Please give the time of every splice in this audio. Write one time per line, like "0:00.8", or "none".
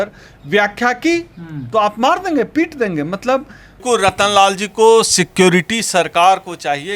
0:03.8

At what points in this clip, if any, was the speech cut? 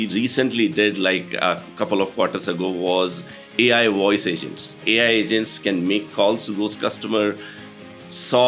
0:04.8

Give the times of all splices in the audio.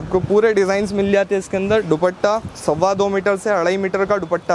none

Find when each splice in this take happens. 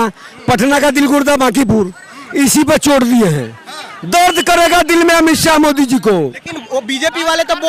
none

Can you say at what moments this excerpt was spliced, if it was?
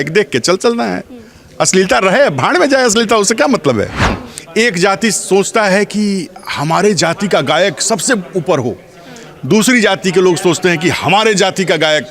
0:04.2

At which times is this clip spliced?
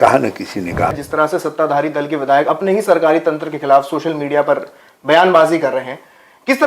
0:00.9

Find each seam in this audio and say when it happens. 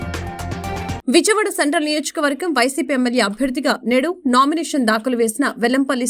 0:01.0

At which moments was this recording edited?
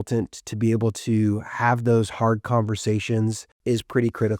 0:03.5

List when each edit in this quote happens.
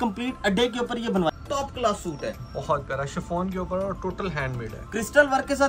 0:01.3

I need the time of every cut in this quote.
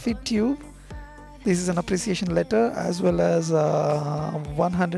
none

